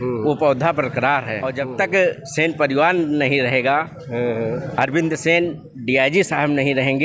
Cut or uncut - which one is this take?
cut